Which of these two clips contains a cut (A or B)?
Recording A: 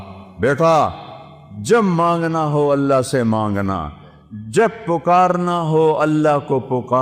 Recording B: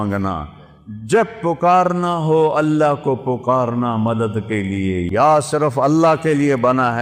B